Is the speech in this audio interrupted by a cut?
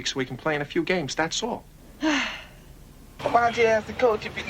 yes; 2 cuts; at 1.8 s, 3.0 s

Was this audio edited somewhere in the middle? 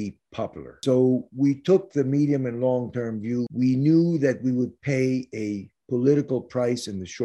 yes; 2 cuts; at 0.8 s, 3.5 s

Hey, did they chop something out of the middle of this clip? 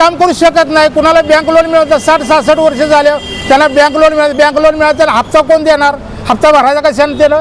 no; 0 cuts

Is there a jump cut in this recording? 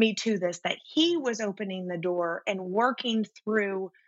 no; 0 cuts

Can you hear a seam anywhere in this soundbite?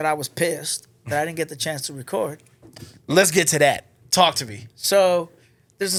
no; 0 cuts

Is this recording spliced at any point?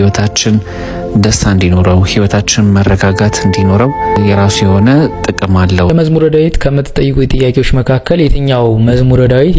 yes; 2 cuts; at 4.2 s, 5.9 s

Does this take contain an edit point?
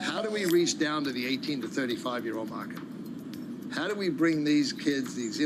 no; 0 cuts

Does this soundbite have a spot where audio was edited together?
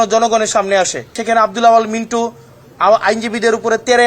yes; 1 cut; at 1.2 s

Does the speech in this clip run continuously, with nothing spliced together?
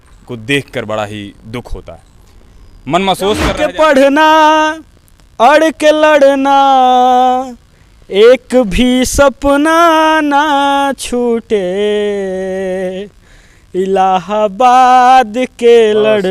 no; 1 cut; at 3.5 s

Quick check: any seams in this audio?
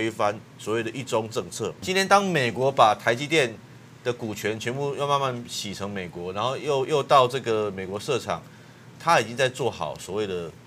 yes; 2 cuts; at 1.8 s, 8.9 s

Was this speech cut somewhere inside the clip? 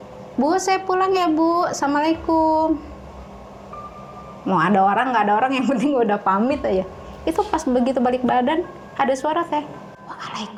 no; 0 cuts

